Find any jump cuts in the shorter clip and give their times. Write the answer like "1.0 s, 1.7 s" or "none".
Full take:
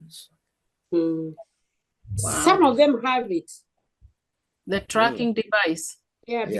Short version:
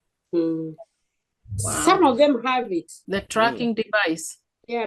3.0 s

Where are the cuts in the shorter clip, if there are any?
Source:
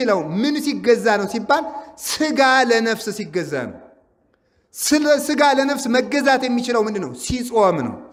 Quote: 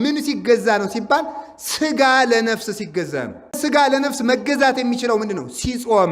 3.6 s

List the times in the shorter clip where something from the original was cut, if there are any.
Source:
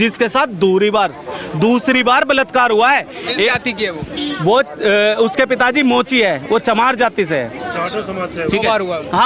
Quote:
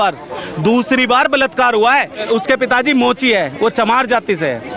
2.2 s

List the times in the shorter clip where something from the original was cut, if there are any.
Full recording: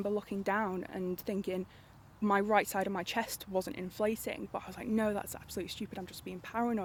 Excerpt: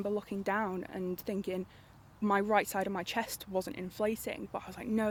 none

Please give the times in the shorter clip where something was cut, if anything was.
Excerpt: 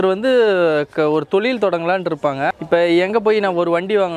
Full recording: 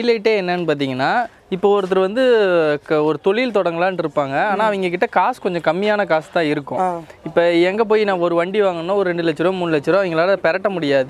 2.5 s

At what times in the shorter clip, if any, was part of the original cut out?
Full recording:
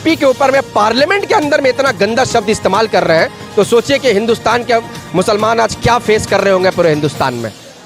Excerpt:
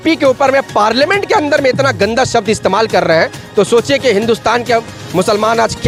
none

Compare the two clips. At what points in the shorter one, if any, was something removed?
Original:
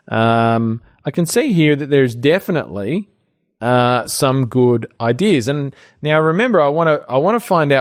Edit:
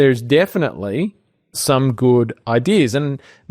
1.6 s

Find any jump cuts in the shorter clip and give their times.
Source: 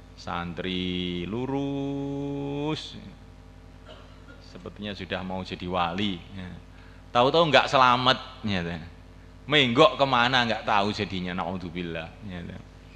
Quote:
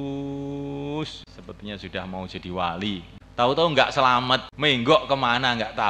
1.3 s, 3.2 s, 4.5 s

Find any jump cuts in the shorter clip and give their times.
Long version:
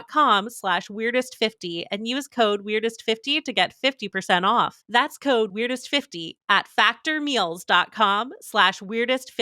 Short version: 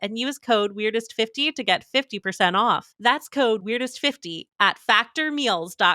none

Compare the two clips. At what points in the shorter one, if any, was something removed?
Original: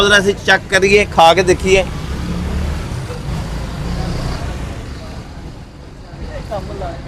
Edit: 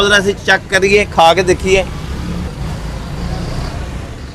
2.5 s

